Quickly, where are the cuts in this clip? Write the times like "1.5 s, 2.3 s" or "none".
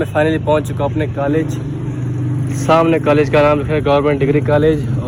none

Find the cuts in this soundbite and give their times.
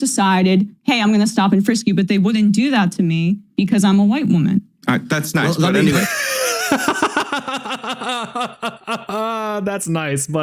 none

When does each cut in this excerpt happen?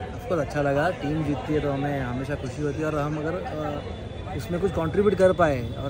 none

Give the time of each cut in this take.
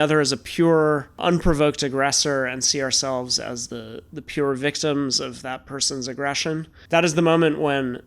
1.2 s, 6.7 s

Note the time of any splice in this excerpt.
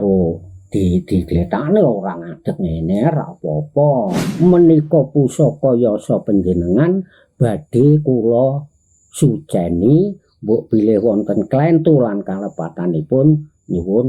4.2 s

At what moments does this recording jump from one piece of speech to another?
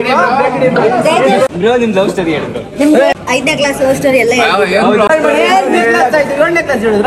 1.5 s, 3.1 s, 5.1 s

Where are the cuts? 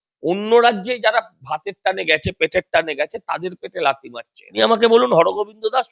4.5 s

